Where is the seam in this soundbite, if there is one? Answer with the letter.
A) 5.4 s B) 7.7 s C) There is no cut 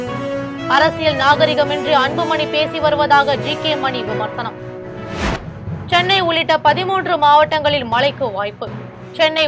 A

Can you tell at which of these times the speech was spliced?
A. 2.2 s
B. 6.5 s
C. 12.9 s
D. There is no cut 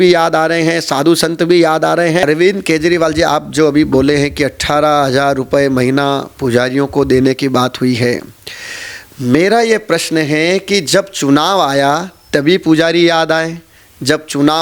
A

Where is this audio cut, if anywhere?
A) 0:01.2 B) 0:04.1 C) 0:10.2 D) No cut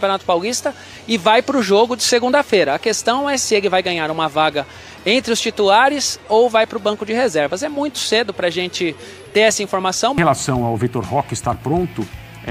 C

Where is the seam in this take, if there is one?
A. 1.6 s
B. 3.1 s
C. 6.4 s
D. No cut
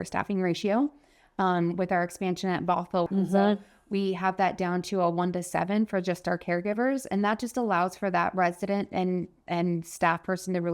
B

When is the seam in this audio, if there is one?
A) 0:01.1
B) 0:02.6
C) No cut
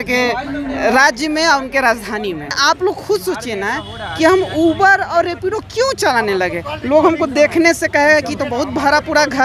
B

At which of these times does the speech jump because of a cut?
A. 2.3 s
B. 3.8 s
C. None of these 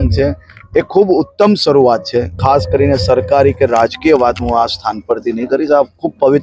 A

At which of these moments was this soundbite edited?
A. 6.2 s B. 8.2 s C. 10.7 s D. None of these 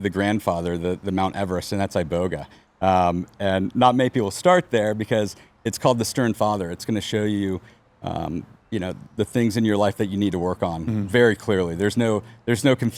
D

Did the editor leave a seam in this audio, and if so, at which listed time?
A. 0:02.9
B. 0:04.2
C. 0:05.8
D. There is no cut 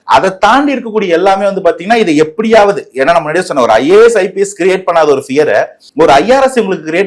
C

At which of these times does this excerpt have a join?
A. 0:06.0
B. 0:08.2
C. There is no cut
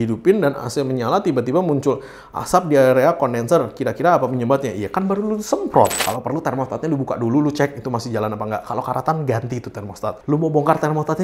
A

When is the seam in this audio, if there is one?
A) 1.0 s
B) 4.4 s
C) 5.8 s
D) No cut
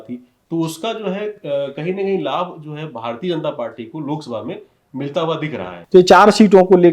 C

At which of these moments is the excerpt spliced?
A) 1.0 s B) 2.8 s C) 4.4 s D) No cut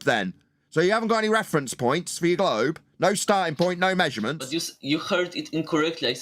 C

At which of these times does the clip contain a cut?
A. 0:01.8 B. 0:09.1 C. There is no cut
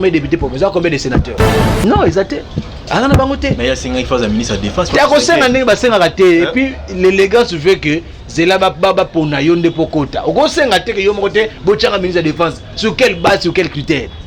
A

